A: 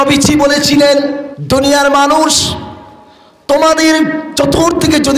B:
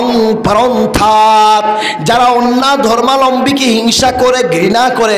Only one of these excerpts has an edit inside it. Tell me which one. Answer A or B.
A